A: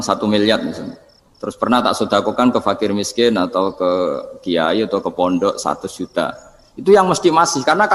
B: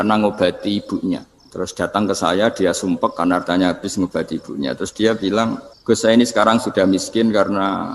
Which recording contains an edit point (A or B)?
B